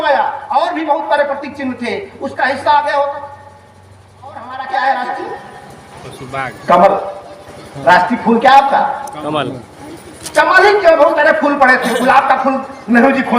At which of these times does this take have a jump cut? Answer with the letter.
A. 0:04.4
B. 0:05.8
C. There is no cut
A